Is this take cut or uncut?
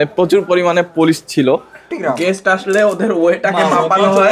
cut